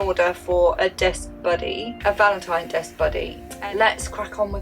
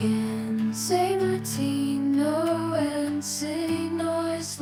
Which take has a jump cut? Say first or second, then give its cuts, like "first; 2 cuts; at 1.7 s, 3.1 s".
first; 1 cut; at 3.4 s